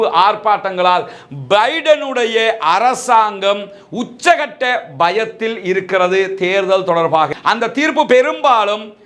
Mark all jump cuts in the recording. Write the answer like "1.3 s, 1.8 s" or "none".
7.3 s